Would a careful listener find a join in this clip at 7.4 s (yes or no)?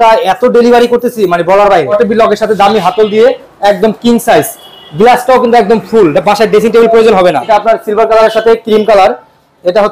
yes